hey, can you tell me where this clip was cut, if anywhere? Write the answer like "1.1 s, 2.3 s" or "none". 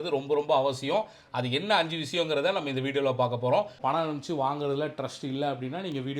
3.7 s